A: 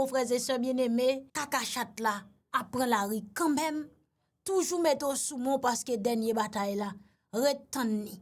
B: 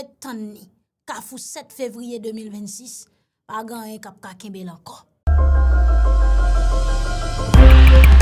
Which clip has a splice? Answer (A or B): A